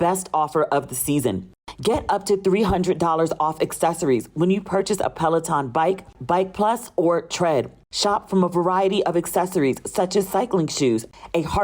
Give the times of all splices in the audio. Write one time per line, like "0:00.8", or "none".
none